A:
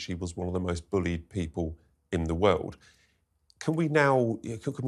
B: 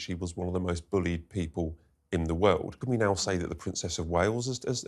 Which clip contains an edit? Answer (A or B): B